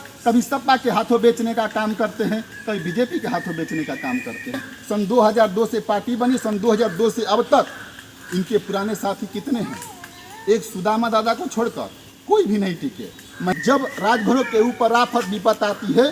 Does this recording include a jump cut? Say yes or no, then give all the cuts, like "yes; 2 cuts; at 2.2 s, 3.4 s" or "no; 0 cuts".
yes; 2 cuts; at 4.7 s, 13.5 s